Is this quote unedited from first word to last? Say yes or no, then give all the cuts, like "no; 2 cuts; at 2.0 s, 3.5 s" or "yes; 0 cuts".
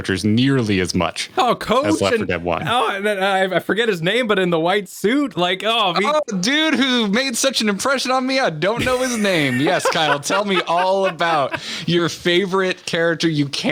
yes; 0 cuts